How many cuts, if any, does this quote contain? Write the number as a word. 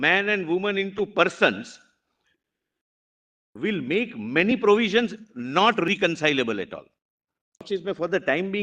one